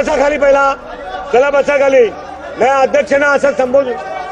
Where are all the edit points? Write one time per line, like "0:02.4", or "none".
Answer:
none